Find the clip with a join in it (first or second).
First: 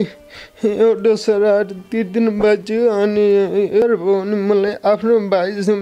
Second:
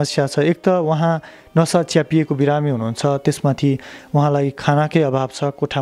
first